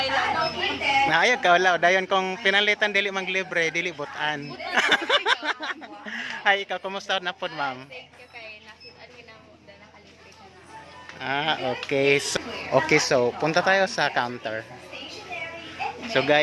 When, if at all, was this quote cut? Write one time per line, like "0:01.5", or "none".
0:12.3

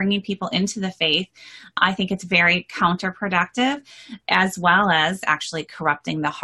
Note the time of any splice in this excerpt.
0:01.8
0:04.2
0:05.2

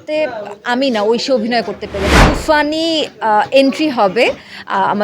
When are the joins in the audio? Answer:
0:02.2

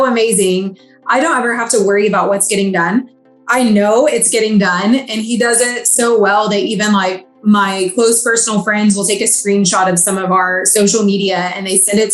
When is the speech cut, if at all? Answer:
none

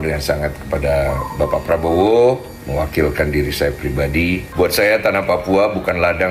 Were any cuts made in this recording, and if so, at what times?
0:04.5

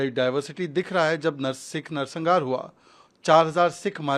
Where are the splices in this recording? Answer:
none

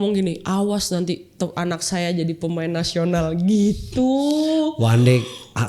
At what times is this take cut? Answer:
none

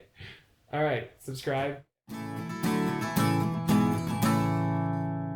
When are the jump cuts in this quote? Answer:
0:01.9

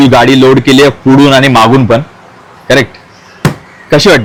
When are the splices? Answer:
none

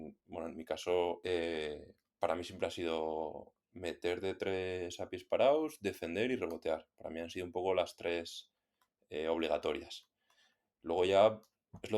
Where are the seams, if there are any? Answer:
0:01.2

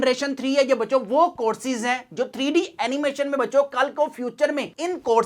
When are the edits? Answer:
none

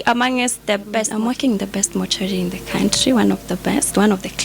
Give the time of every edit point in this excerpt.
0:01.1

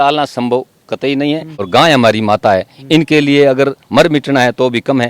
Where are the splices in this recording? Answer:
0:01.6

